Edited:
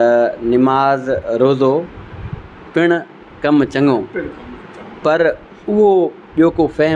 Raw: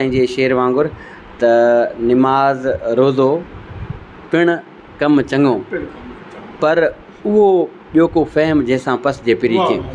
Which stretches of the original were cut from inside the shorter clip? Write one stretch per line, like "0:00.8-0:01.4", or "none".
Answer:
none